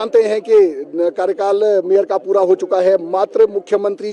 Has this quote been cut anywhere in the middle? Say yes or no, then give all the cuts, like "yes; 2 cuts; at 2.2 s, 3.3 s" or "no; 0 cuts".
no; 0 cuts